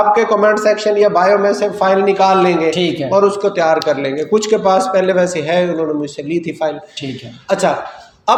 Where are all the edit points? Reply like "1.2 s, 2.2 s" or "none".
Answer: none